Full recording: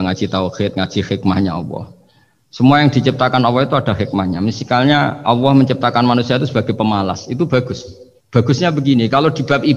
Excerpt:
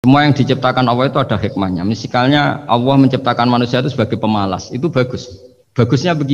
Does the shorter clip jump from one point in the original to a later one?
no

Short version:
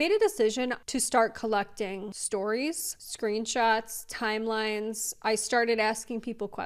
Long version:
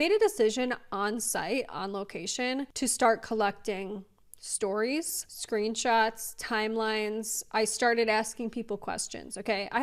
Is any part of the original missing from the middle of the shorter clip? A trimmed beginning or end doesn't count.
yes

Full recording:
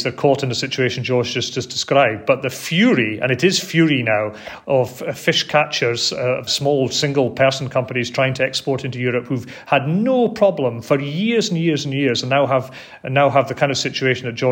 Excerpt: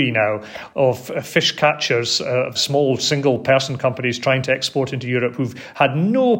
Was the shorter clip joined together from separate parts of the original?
no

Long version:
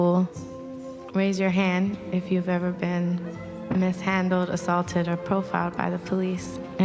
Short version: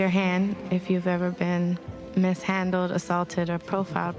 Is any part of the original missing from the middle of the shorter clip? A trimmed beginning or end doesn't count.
yes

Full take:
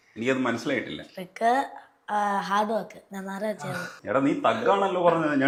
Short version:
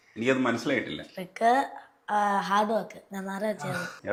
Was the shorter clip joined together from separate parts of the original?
no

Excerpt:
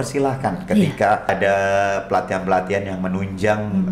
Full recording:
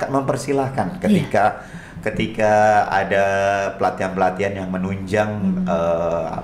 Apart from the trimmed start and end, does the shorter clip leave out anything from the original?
yes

